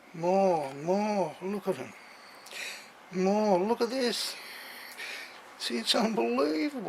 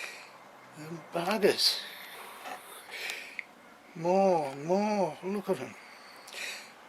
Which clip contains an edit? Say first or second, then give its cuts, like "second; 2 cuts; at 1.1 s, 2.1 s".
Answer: second; 1 cut; at 2.2 s